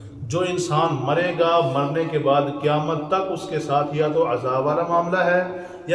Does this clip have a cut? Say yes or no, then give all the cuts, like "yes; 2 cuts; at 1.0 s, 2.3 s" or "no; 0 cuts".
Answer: no; 0 cuts